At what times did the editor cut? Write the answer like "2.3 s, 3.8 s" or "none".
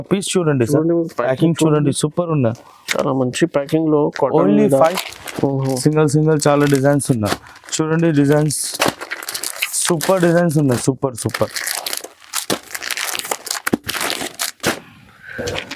4.8 s